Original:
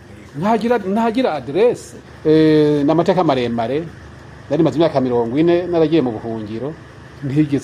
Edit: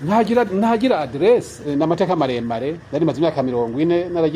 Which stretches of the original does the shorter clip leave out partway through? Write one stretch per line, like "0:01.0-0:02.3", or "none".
0:02.0-0:02.8
0:03.9-0:04.4